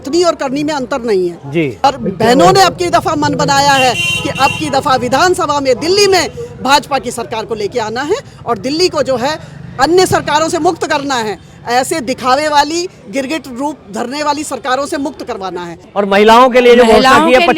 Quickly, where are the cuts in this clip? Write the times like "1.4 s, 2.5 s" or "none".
1.8 s, 15.8 s